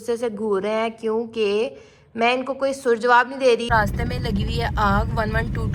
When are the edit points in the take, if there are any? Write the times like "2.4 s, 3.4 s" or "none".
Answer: 3.7 s